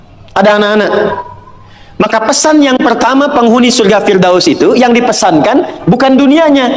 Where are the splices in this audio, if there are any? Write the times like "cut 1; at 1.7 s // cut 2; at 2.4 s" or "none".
none